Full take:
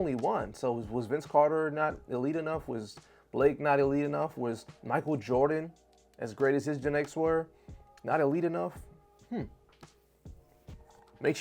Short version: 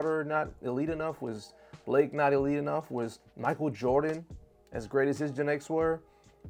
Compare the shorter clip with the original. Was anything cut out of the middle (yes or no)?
no